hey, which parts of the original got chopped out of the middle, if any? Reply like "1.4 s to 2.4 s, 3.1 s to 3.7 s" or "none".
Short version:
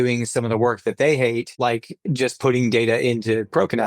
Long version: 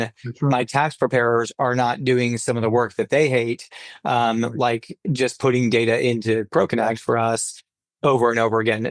3.7 s to 4.5 s